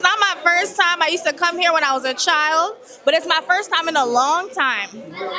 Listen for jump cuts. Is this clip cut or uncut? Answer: uncut